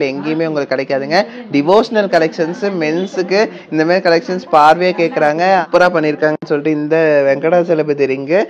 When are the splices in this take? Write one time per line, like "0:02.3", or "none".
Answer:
0:05.7